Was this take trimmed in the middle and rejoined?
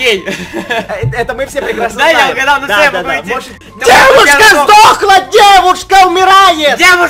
yes; 1 cut; at 3.6 s

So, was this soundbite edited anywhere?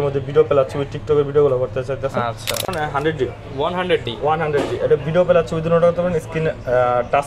yes; 1 cut; at 2.7 s

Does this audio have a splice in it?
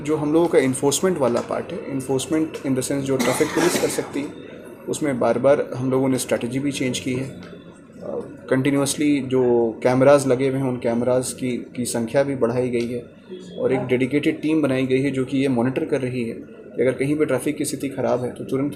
no; 0 cuts

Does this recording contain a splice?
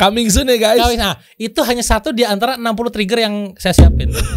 no; 0 cuts

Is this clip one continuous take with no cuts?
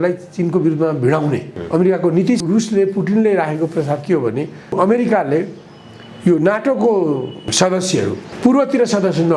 no; 4 cuts; at 1.5 s, 2.4 s, 4.8 s, 7.8 s

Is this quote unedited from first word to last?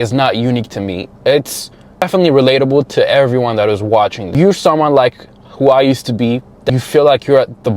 no; 3 cuts; at 2.0 s, 4.2 s, 6.7 s

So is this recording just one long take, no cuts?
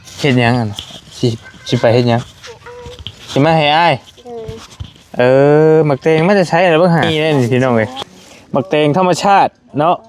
no; 1 cut; at 7.1 s

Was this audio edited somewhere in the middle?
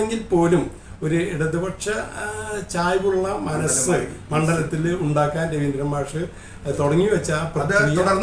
no; 0 cuts

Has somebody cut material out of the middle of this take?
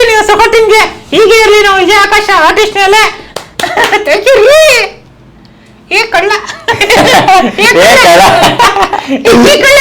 yes; 1 cut; at 3.3 s

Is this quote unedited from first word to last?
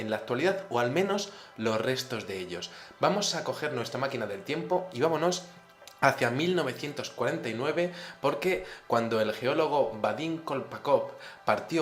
yes; 0 cuts

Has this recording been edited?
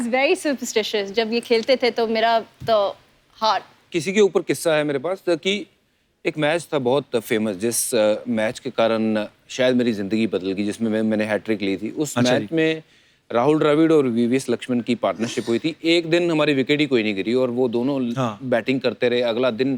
no; 0 cuts

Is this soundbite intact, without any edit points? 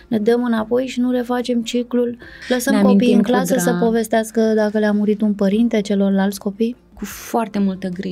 no; 2 cuts; at 2.3 s, 7.1 s

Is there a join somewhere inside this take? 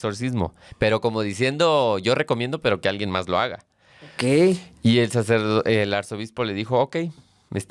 no; 0 cuts

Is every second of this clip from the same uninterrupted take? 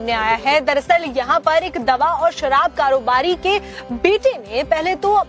no; 1 cut; at 1.7 s

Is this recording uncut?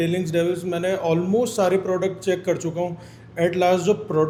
yes; 0 cuts

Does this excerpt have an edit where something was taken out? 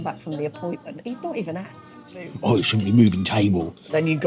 yes; 1 cut; at 2.3 s

